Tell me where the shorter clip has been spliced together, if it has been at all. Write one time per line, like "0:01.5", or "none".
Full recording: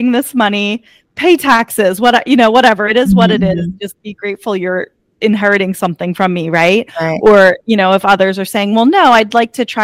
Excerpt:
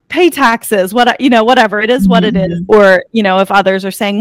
0:02.6